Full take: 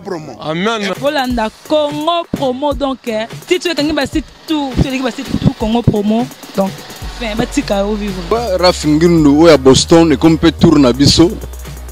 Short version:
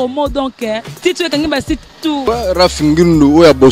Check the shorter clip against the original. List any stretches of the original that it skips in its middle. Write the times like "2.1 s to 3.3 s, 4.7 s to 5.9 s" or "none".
4.7 s to 8.3 s